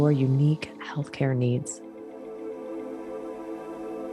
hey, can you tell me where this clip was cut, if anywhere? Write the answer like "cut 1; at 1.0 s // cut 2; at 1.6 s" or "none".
cut 1; at 1.7 s